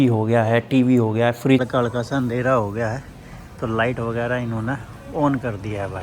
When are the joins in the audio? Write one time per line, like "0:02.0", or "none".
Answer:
0:01.7

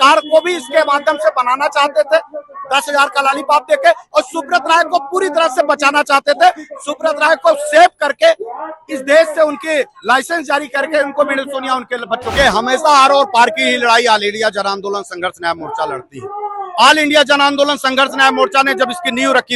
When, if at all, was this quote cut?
0:12.3

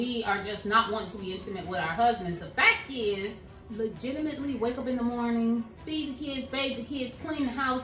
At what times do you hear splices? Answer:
0:03.5

